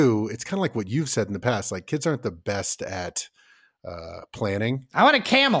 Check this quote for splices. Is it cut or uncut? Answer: uncut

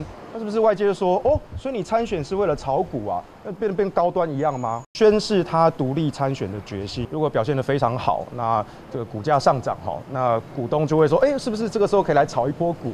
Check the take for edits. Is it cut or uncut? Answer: cut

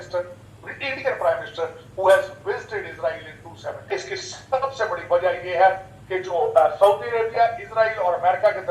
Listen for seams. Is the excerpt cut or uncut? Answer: cut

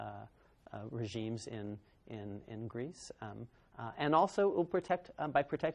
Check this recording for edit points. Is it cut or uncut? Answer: uncut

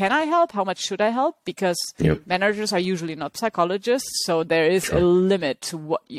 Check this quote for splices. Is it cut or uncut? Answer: uncut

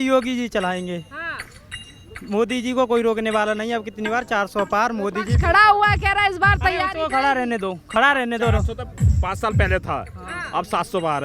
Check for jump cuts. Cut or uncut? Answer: uncut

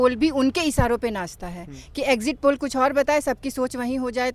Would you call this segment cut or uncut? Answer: uncut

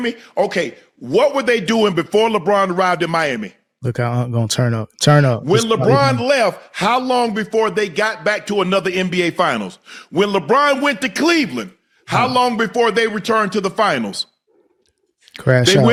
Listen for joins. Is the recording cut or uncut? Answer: uncut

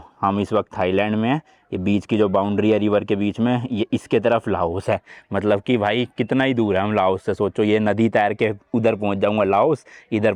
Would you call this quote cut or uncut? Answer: uncut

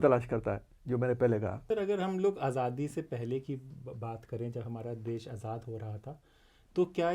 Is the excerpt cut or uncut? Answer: cut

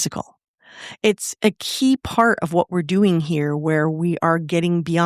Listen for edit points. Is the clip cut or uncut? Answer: cut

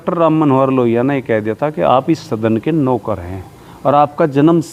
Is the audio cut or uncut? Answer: uncut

